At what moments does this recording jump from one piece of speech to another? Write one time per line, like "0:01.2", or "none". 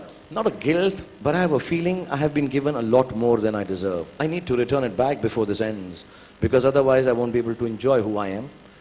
none